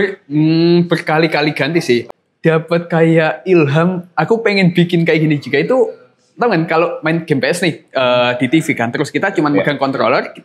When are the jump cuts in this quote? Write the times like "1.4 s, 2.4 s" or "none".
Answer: 2.1 s